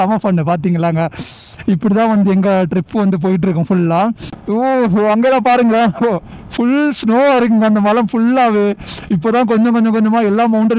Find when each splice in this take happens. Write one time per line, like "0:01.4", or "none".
0:04.3

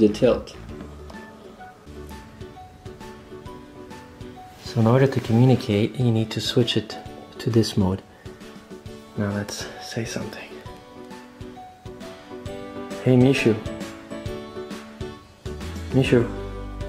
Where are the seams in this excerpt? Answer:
0:01.9

